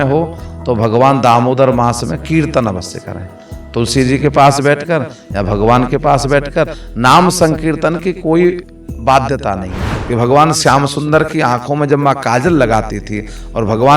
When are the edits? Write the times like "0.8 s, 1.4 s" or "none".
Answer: 9.9 s